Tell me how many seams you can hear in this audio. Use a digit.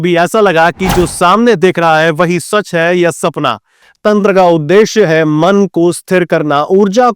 1